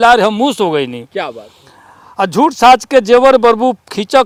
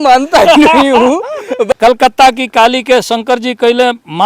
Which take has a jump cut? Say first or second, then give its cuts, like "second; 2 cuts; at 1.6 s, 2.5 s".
second; 1 cut; at 1.7 s